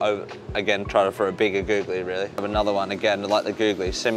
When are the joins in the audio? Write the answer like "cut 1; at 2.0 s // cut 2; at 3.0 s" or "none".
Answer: cut 1; at 2.5 s